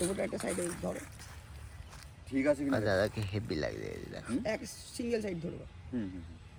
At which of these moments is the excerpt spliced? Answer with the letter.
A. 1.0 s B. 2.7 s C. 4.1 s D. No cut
D